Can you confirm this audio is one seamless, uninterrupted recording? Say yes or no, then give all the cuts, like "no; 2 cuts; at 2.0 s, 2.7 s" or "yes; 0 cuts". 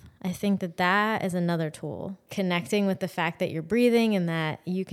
no; 1 cut; at 2.2 s